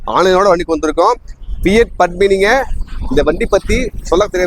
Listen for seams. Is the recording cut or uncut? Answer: uncut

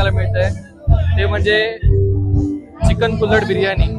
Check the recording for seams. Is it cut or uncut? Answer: uncut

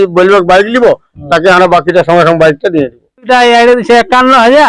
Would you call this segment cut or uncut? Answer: cut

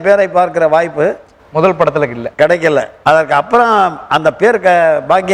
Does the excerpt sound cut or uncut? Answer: cut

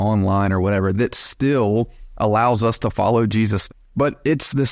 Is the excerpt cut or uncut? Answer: cut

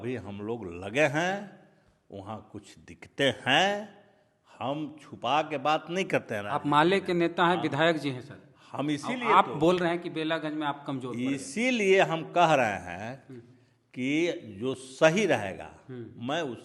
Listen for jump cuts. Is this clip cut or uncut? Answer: uncut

